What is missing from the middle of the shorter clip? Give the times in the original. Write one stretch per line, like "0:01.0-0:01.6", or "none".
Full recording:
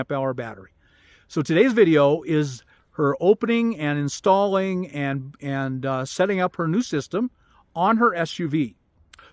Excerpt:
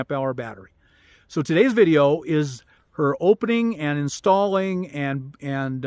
none